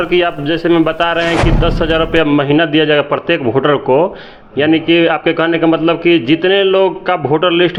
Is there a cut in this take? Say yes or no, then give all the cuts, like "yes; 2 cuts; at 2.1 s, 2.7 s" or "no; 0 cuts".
no; 0 cuts